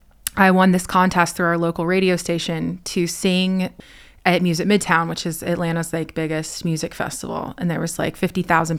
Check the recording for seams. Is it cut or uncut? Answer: cut